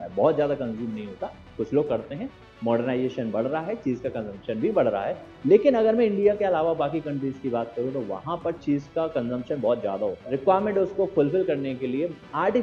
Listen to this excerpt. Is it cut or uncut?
uncut